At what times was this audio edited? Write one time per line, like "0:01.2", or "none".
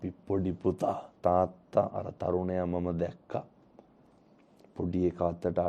0:01.1